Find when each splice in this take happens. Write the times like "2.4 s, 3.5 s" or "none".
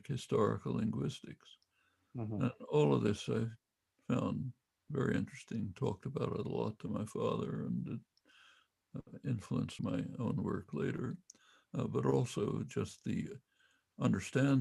9.7 s